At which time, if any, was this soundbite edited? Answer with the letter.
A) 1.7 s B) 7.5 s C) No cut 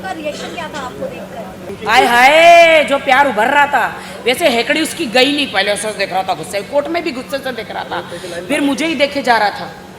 A